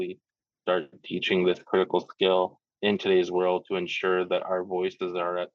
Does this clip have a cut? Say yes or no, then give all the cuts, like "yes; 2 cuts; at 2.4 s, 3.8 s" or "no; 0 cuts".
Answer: yes; 1 cut; at 2.7 s